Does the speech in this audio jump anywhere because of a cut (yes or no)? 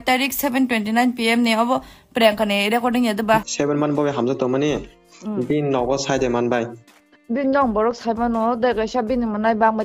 yes